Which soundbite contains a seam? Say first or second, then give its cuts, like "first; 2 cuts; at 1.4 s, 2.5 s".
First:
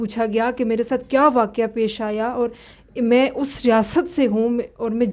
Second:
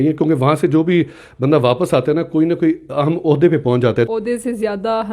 second; 1 cut; at 4.1 s